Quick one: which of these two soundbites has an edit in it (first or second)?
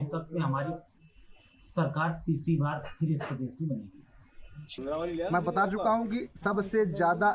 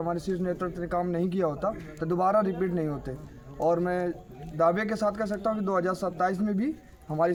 first